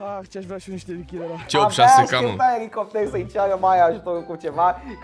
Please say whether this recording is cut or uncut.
cut